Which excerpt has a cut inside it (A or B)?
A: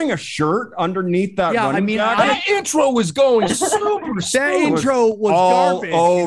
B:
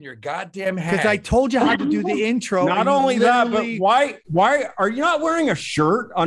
A